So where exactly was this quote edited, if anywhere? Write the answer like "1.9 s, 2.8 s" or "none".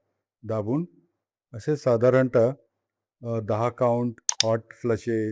4.3 s